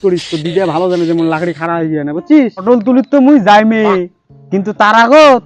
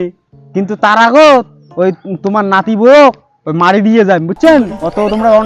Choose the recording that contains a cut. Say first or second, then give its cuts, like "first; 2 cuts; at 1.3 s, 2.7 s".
first; 1 cut; at 2.6 s